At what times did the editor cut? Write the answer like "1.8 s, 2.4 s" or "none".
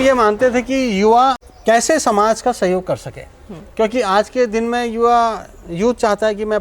1.5 s